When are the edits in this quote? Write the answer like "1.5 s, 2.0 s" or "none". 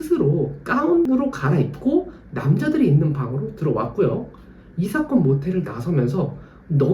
1.1 s